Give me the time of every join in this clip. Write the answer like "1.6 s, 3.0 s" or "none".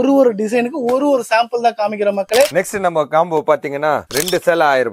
2.5 s